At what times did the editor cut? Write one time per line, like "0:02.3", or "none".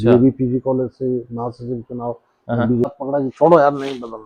0:02.9